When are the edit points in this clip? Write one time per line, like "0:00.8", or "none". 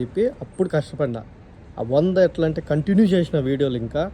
none